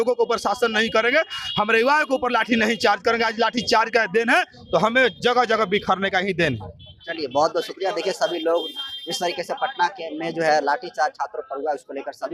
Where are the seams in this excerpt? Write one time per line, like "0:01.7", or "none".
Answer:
none